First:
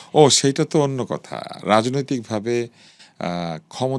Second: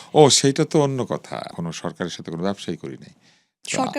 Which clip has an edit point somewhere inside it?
second; 1 cut; at 1.5 s

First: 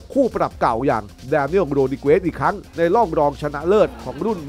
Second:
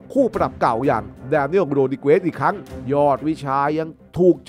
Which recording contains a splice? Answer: second; 1 cut; at 2.6 s

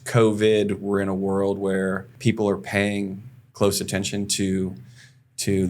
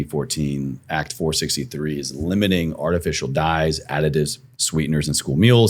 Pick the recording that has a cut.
first; 1 cut; at 2.1 s

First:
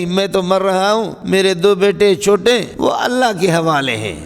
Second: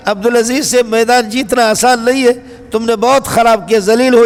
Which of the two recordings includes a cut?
first; 2 cuts; at 1.2 s, 2.7 s

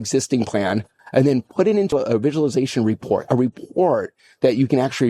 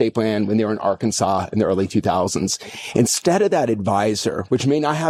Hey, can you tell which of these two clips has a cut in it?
first; 2 cuts; at 0.9 s, 1.9 s

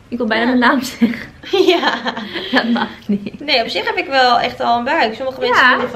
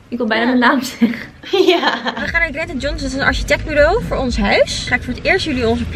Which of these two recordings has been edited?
second; 2 cuts; at 2.3 s, 4.8 s

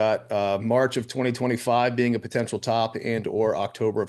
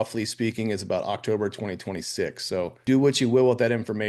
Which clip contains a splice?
second; 1 cut; at 2.8 s

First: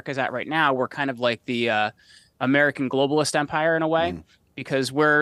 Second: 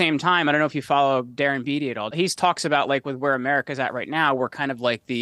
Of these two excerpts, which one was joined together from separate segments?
second; 1 cut; at 2.1 s

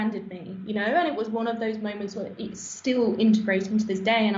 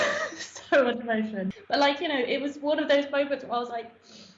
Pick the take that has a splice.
second; 1 cut; at 1.6 s

